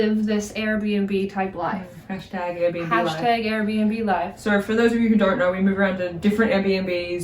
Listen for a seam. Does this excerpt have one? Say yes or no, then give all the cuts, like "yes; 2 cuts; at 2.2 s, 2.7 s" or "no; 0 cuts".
no; 0 cuts